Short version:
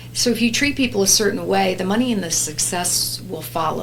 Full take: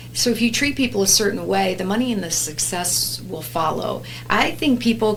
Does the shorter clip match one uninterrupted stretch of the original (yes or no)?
yes